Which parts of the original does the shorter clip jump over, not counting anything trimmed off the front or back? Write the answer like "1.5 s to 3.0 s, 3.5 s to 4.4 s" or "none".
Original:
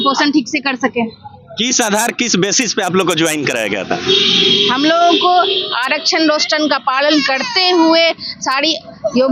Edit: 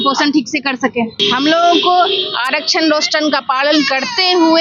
1.2 s to 4.6 s